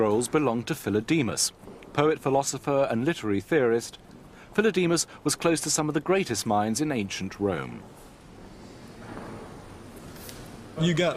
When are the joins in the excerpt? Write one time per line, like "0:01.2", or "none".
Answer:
none